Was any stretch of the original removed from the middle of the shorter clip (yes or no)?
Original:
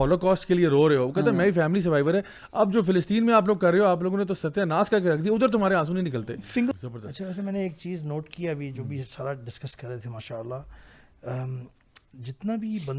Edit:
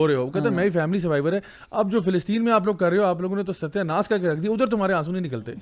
no